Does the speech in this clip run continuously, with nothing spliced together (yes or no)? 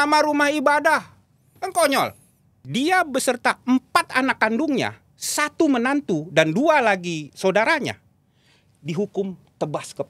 no